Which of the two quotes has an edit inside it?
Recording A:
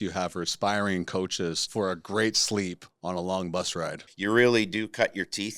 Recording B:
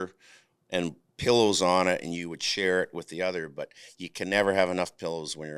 A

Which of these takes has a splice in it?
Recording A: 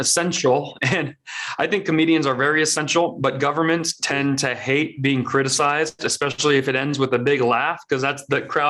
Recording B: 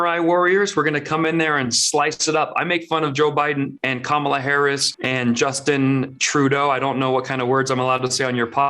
B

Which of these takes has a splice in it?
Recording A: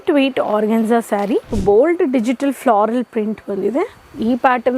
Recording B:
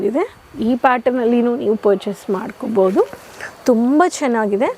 A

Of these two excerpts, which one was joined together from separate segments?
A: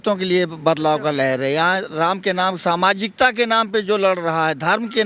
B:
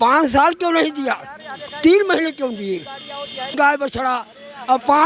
B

